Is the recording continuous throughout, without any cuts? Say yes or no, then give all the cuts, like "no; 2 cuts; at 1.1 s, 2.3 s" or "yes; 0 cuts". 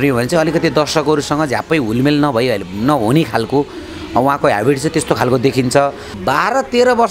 no; 1 cut; at 6.1 s